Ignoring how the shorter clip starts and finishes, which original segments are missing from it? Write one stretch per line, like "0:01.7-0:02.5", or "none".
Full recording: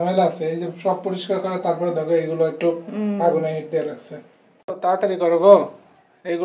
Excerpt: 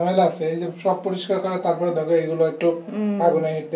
none